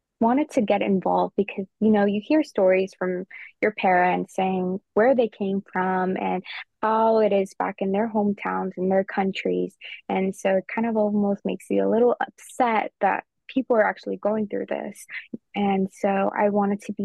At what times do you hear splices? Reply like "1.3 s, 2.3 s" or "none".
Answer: 15.3 s